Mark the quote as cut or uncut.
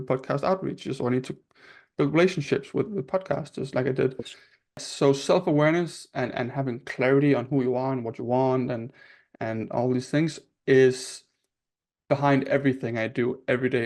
cut